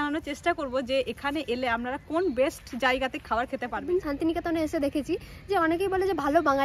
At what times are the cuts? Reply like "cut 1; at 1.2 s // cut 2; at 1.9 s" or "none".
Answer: cut 1; at 3.8 s